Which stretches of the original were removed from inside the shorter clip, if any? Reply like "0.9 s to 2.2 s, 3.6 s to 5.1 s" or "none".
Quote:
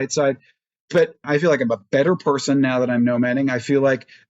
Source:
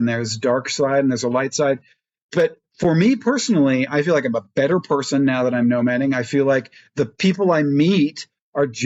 2.7 s to 3.9 s